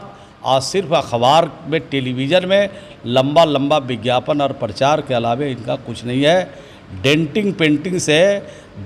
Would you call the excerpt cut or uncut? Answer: uncut